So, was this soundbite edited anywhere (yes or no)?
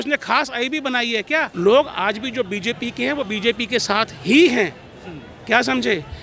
yes